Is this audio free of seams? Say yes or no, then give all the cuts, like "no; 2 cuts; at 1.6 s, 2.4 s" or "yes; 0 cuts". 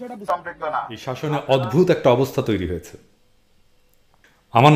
no; 1 cut; at 1.2 s